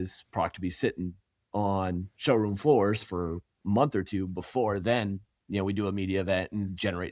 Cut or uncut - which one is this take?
uncut